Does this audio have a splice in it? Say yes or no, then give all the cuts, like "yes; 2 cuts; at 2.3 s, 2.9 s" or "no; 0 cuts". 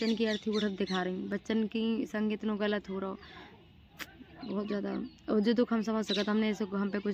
no; 0 cuts